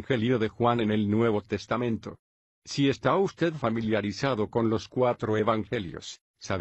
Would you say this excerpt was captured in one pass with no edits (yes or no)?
no